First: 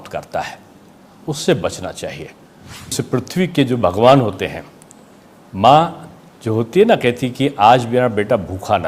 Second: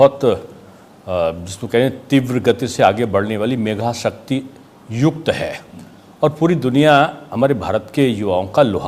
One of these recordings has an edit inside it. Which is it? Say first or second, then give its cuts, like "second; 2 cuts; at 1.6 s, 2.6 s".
first; 1 cut; at 2.9 s